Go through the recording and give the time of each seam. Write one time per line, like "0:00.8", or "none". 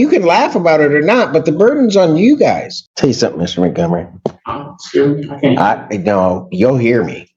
0:02.7